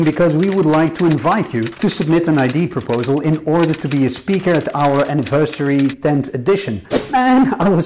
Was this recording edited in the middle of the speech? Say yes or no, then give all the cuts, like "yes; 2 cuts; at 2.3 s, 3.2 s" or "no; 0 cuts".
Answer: yes; 1 cut; at 6.8 s